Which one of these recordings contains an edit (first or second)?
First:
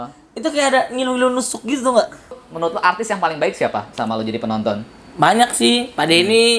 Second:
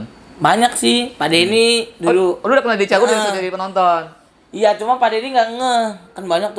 first